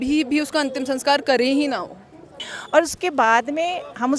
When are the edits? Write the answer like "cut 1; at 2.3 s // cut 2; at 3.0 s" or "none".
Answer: cut 1; at 2.5 s